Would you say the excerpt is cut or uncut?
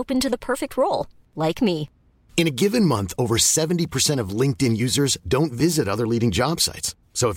uncut